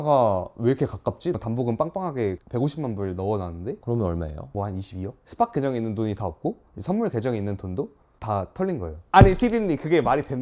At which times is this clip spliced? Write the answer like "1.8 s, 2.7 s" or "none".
9.0 s